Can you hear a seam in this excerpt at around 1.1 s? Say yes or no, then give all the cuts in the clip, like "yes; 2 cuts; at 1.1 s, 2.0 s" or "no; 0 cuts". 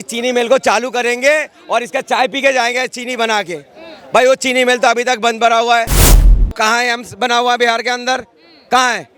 no; 1 cut; at 6.2 s